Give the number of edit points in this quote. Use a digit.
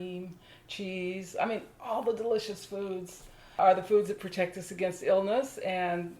1